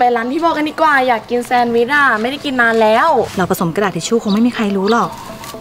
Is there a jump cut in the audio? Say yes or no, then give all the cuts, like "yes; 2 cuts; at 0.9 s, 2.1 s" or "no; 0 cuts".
yes; 1 cut; at 3.3 s